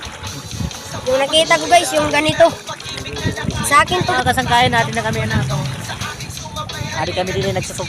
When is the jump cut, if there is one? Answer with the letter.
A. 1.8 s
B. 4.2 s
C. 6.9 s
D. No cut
B